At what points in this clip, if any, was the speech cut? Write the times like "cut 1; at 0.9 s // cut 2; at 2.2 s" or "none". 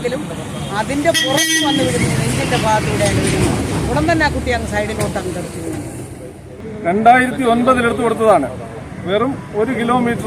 cut 1; at 6.6 s